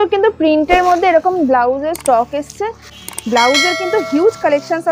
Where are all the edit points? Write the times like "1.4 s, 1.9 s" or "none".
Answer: 2.9 s